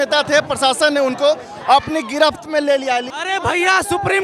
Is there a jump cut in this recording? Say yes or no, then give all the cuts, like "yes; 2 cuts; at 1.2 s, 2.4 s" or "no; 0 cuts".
yes; 1 cut; at 3.1 s